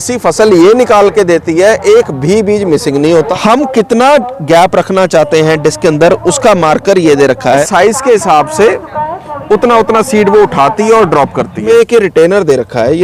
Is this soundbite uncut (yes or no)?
no